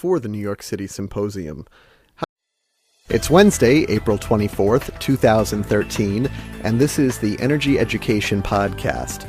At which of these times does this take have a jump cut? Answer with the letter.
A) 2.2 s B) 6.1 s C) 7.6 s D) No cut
D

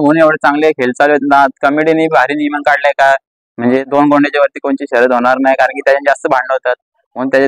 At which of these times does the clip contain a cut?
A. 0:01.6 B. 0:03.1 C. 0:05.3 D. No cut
D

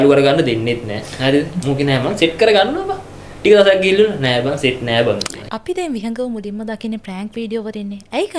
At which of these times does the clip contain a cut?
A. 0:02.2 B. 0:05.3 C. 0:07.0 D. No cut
B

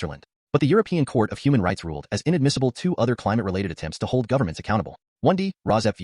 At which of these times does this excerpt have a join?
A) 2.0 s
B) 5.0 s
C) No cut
B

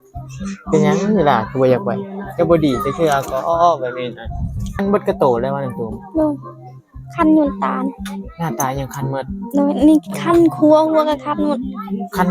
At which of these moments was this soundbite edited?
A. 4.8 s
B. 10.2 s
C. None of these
A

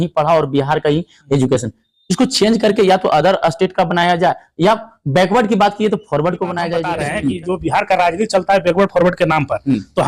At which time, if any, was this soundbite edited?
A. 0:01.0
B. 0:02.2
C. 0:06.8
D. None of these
C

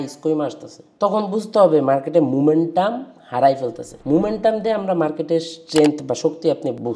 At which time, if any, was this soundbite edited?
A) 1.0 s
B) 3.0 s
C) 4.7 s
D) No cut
D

